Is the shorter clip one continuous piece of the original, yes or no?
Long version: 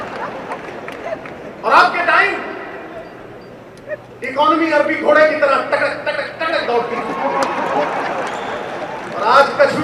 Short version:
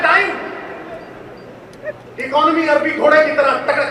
yes